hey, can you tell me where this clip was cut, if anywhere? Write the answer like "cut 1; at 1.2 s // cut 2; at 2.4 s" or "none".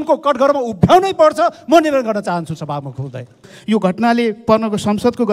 cut 1; at 3.5 s